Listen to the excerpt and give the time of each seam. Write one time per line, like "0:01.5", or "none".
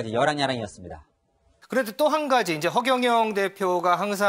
0:01.5